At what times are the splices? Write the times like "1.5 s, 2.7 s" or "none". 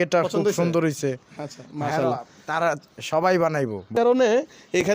3.9 s